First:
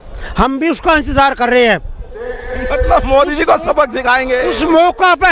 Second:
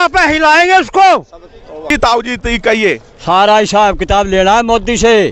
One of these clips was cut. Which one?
second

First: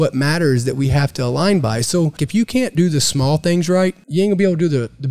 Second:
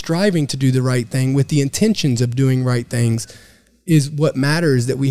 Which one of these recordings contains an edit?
first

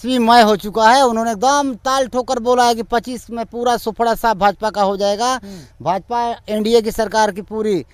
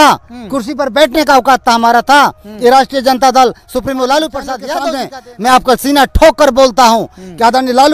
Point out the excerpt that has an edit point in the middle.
second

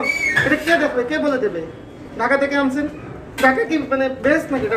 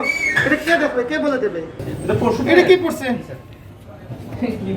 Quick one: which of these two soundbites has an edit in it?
second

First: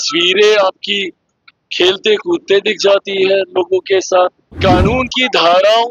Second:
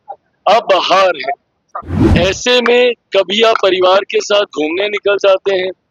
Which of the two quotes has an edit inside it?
first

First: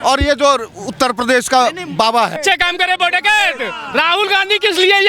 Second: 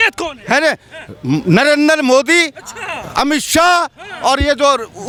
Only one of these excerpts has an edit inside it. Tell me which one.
first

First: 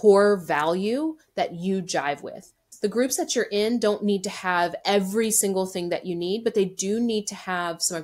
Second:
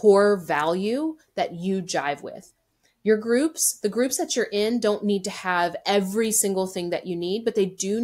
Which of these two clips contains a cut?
first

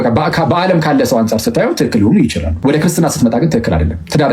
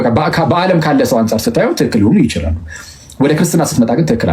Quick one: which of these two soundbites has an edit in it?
first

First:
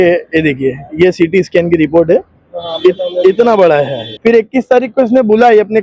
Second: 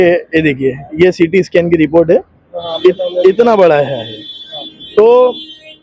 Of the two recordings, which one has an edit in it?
first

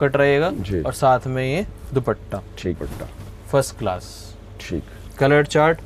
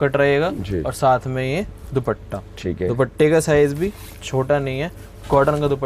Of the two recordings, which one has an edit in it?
first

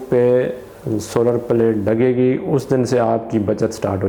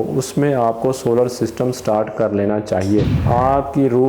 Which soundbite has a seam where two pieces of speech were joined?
second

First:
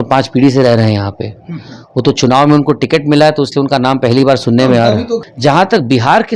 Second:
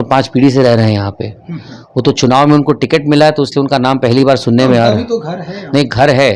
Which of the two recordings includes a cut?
first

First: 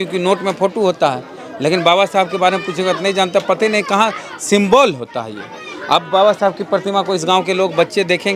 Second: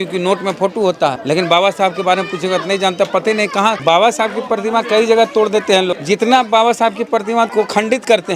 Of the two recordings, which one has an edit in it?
second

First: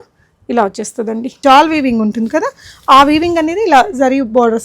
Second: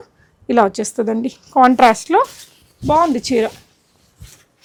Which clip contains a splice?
first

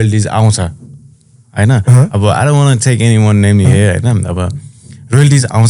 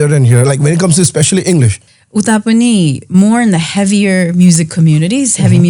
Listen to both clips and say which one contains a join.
second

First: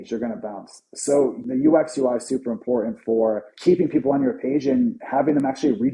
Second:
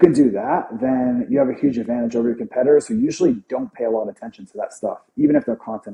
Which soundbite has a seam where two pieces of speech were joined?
first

